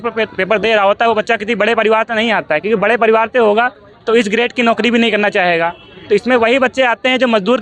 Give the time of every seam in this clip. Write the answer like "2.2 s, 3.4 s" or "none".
none